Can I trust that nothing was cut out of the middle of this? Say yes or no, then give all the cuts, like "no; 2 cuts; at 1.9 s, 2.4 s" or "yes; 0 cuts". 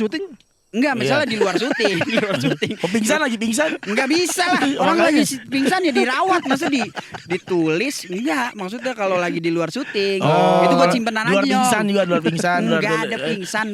yes; 0 cuts